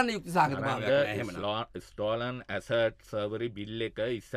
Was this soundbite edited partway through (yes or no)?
no